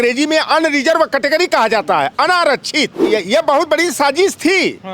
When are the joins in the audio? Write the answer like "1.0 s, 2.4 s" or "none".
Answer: 3.0 s